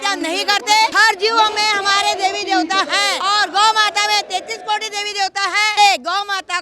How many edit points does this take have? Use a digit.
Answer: 3